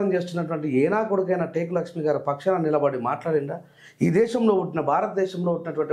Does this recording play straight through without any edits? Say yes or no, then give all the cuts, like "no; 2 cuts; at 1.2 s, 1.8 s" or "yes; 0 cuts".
yes; 0 cuts